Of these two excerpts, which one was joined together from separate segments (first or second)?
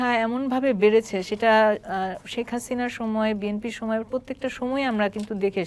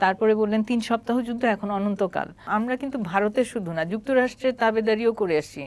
second